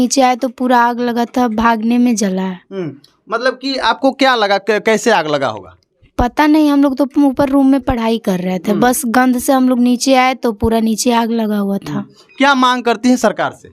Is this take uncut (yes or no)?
yes